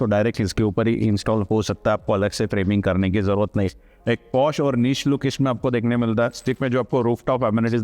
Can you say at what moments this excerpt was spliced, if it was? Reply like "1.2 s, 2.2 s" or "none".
6.5 s